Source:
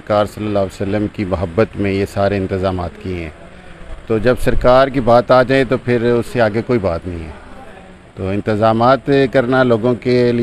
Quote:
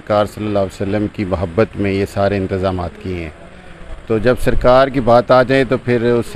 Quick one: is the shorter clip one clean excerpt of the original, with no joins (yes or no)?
yes